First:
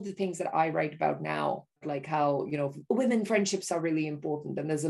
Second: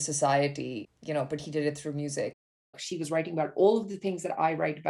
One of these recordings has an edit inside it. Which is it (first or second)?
second